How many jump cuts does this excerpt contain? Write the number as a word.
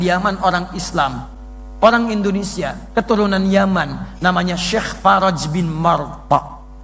zero